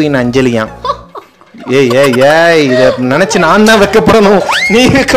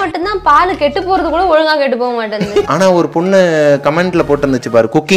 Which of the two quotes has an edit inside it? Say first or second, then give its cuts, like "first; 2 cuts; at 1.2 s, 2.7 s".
second; 1 cut; at 2.7 s